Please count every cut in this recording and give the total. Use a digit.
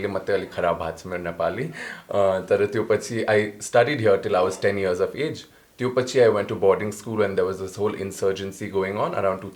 0